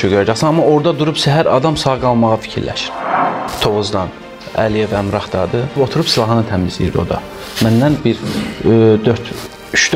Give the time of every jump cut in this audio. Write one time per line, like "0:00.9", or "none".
0:03.3
0:05.8